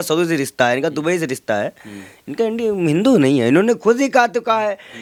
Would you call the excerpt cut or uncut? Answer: uncut